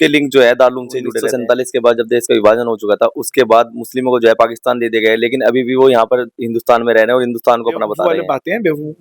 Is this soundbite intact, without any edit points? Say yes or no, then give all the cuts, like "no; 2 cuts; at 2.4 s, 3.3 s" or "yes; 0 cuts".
no; 2 cuts; at 1.3 s, 8.1 s